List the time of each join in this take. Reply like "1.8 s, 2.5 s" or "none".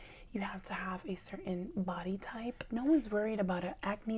2.6 s